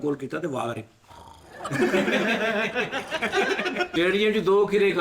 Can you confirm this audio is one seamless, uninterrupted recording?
no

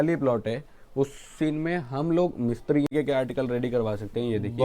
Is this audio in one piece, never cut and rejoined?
no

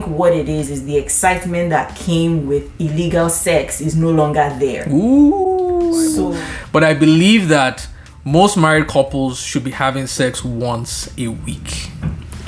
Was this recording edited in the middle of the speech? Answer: yes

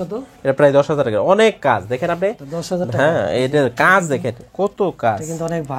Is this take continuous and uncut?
yes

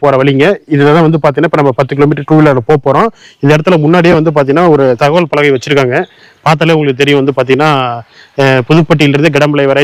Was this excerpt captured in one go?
yes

